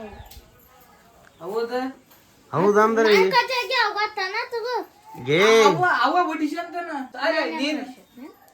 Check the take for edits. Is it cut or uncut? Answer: cut